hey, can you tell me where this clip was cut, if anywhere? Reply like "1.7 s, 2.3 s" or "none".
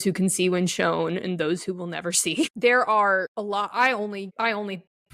2.5 s, 3.3 s, 4.3 s